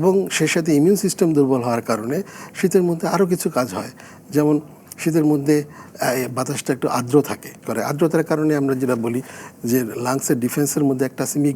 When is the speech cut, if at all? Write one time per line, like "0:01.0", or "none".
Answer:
0:07.6